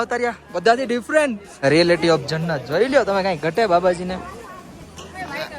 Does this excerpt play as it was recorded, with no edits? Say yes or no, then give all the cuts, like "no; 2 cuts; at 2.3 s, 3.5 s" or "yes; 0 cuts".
no; 1 cut; at 1.5 s